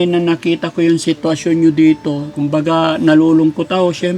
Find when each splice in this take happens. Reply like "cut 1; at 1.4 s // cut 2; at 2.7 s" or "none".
cut 1; at 2.3 s